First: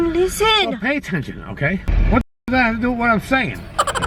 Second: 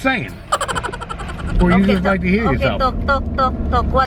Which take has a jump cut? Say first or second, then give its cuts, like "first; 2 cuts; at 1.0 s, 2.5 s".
first; 1 cut; at 1.9 s